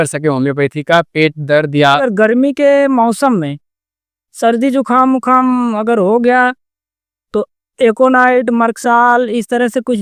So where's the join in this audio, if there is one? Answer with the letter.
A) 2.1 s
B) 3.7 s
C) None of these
A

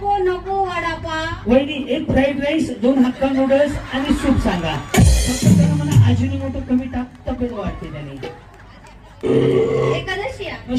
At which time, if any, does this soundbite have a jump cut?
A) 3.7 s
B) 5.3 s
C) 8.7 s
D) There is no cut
D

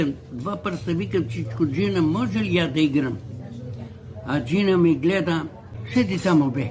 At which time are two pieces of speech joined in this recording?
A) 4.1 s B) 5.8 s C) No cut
B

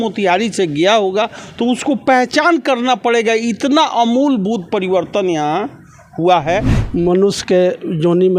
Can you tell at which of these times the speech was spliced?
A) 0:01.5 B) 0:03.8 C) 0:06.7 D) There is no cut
C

